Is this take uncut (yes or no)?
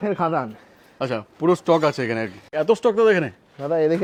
yes